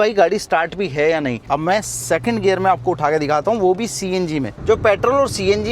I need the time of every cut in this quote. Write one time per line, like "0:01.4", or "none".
0:01.4
0:04.5